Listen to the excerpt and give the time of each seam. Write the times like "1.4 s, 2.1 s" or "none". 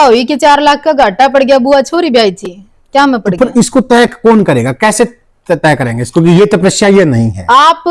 none